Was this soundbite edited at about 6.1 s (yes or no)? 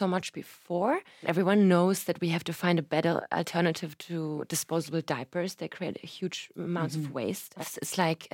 no